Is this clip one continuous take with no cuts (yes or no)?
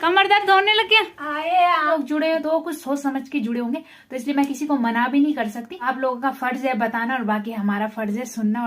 no